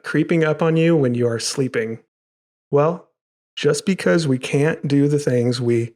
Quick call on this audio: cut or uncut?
cut